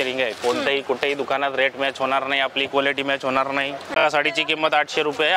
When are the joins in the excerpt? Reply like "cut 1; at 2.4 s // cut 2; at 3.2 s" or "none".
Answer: cut 1; at 4.0 s